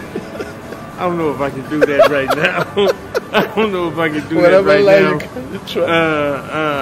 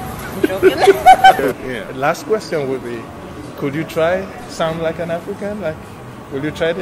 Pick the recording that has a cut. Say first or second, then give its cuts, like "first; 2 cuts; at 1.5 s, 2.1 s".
second; 1 cut; at 1.4 s